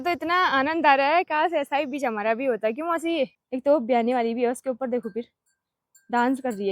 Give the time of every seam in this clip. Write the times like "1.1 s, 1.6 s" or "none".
3.4 s